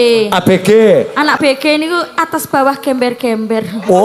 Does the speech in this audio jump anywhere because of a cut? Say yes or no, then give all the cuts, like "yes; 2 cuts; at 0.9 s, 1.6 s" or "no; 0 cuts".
yes; 1 cut; at 1.4 s